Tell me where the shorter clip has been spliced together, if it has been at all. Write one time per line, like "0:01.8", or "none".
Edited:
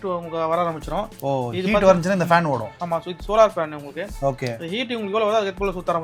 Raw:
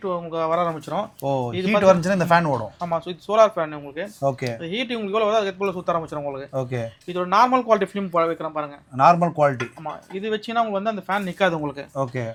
none